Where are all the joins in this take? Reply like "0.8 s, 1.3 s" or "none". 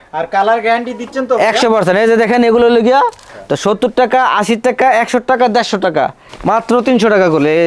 3.3 s, 6.3 s